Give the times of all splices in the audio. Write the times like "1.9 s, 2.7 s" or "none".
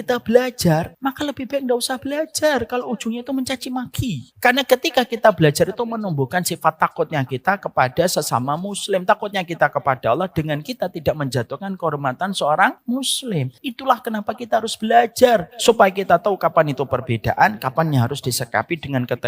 0.9 s, 4.3 s, 13.2 s, 15.5 s